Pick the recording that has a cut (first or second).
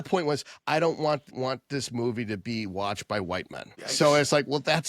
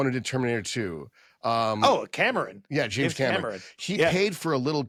first